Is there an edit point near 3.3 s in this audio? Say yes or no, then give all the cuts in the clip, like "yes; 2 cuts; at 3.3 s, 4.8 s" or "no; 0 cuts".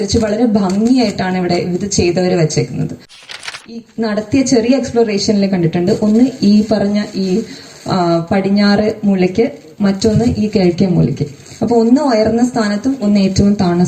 yes; 1 cut; at 3.3 s